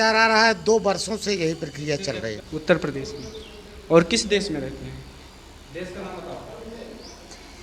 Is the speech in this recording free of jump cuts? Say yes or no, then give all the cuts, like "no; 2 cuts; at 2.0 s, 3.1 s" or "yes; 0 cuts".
no; 1 cut; at 2.4 s